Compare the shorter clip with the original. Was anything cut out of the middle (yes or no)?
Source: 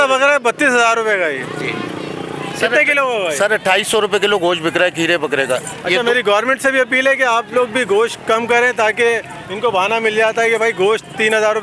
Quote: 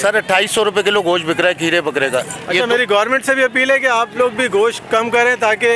no